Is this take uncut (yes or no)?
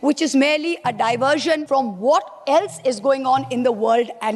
no